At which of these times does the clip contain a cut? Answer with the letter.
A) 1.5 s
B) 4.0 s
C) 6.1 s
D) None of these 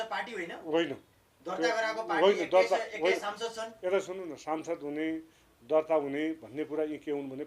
D